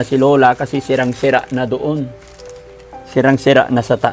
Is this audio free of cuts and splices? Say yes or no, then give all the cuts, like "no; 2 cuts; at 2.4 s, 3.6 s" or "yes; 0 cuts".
yes; 0 cuts